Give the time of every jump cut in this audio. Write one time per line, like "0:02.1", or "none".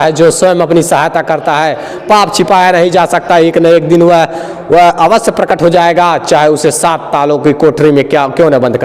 none